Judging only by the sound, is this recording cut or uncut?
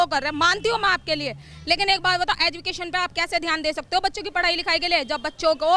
uncut